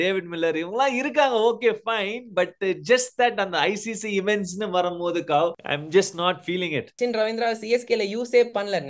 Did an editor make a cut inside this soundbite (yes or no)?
yes